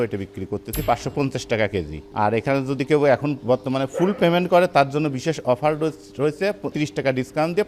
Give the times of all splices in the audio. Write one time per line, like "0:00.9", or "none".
0:02.0
0:06.7